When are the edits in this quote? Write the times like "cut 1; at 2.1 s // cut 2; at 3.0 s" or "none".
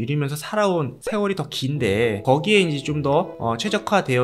none